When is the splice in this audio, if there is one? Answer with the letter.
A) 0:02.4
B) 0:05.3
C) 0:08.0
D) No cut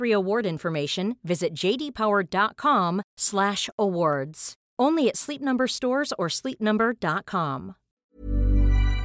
C